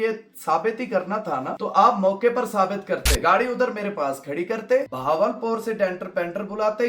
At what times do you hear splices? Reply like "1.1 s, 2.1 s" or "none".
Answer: 1.5 s, 3.1 s, 4.9 s